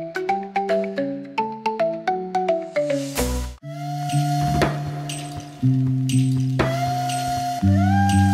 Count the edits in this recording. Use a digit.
1